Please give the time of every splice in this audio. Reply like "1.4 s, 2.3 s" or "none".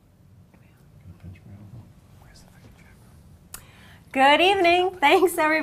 none